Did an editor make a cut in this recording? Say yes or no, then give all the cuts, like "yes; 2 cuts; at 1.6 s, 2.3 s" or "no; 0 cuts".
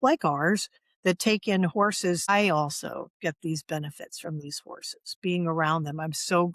yes; 1 cut; at 2.3 s